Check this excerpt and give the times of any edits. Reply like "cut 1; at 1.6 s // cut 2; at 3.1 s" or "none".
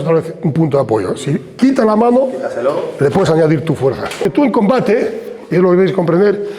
cut 1; at 4.2 s